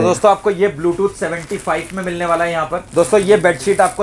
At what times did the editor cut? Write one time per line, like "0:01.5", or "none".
0:02.8